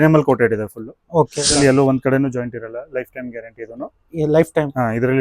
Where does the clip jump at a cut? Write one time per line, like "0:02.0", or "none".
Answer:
0:01.6